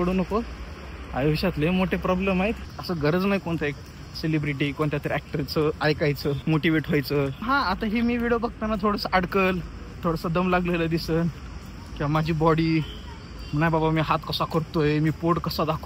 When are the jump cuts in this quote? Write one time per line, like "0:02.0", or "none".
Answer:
0:02.7
0:06.4
0:07.5